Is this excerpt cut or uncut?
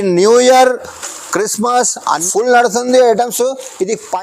cut